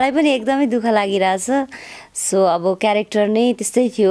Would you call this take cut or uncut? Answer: uncut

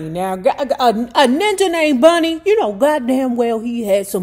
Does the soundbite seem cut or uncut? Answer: uncut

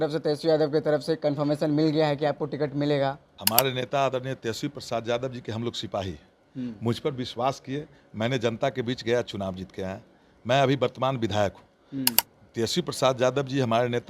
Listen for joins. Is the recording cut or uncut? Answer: cut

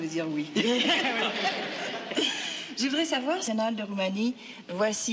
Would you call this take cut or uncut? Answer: uncut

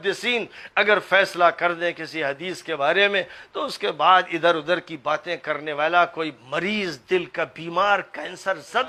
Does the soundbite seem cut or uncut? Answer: uncut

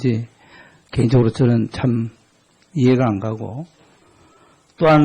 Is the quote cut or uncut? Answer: cut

